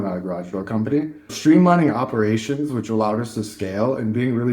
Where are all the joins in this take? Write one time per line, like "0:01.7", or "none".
0:01.3